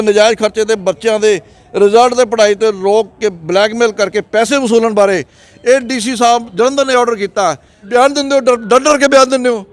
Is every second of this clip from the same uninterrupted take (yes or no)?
no